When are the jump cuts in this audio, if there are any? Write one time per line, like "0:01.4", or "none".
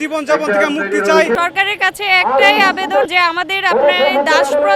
0:01.4
0:03.1

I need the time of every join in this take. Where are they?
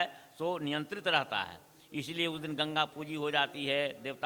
none

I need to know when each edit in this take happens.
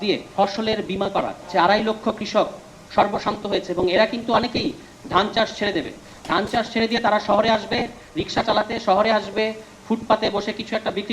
0:01.4

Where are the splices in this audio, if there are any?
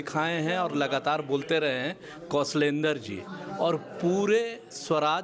none

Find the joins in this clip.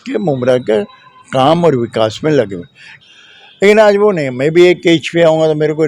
0:02.9

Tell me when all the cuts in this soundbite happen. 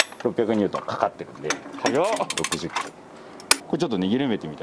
0:03.6

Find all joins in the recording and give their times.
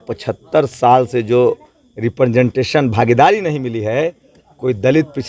none

